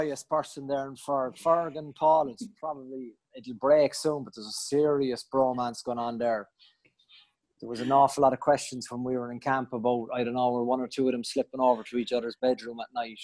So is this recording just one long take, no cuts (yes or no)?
yes